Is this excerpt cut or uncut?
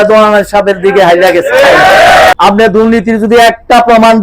cut